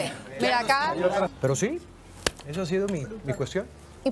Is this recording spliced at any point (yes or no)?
yes